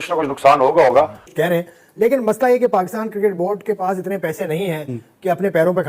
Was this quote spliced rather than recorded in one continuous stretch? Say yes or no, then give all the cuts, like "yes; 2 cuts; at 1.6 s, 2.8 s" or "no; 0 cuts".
yes; 1 cut; at 1.2 s